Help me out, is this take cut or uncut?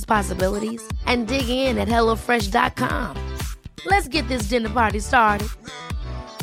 uncut